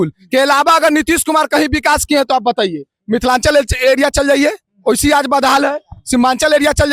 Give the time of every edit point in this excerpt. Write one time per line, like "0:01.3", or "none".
none

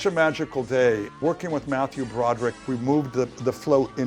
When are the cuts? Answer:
0:01.2
0:02.6

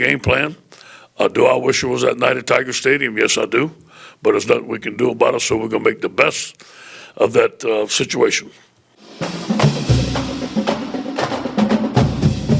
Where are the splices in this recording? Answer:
0:09.2

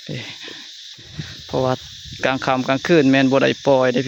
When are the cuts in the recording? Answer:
none

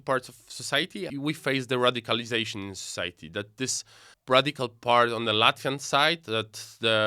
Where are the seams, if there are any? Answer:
0:01.1

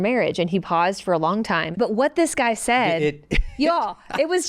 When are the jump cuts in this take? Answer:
0:01.7

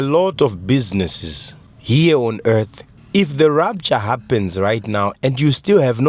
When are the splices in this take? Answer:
0:03.0

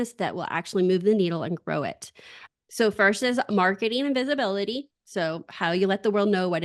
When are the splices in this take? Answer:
0:02.3

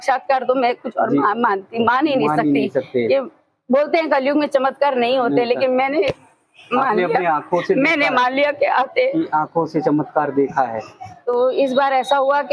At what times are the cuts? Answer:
0:11.1

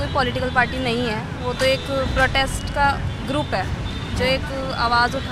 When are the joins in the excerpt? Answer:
none

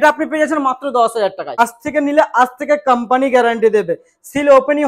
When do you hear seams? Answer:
0:01.5

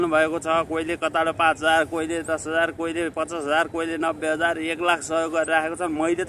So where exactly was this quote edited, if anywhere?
none

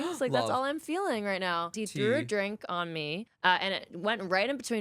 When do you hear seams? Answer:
0:01.7
0:03.3

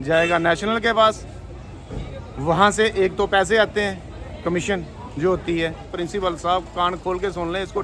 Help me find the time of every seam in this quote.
0:05.9

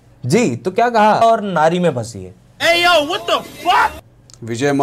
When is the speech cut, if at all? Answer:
0:01.2

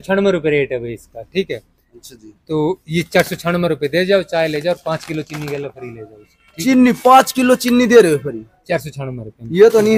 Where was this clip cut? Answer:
none

